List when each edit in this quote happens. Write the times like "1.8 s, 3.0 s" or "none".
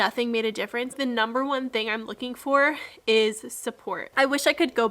0.9 s, 4.0 s